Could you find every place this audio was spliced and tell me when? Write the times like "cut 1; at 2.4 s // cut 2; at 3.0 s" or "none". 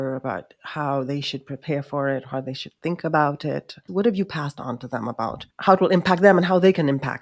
cut 1; at 3.8 s // cut 2; at 5.4 s